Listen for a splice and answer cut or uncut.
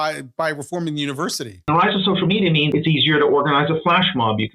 cut